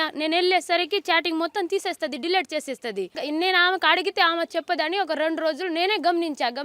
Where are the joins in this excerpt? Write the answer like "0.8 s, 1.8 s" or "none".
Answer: 3.2 s